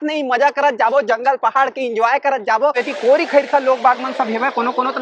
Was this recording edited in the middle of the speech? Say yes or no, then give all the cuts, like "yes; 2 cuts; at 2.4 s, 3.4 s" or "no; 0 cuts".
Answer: yes; 1 cut; at 2.8 s